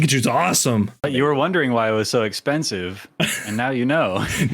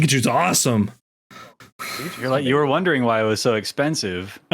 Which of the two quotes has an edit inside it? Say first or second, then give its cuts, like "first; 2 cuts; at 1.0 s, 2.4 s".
first; 1 cut; at 1.0 s